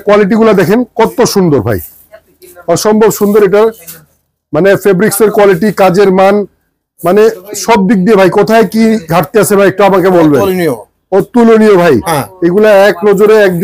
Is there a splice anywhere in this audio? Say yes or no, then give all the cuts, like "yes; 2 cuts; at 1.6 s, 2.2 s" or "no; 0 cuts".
no; 0 cuts